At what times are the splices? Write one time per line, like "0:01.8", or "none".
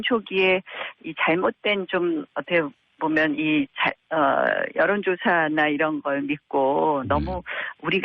0:03.8